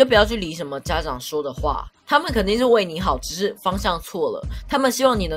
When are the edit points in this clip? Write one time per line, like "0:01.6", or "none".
none